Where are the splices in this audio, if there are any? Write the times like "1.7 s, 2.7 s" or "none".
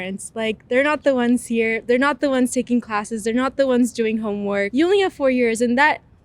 4.7 s